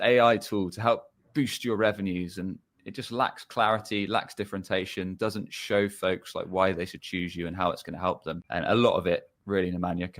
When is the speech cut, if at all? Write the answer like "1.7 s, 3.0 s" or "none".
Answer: 8.4 s